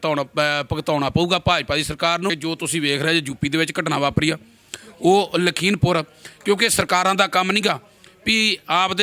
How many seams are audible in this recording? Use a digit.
1